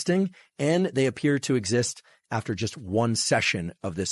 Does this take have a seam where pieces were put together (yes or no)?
no